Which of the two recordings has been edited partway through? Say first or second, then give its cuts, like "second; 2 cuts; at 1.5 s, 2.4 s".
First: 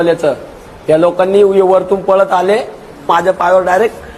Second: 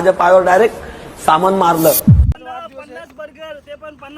second; 1 cut; at 2.3 s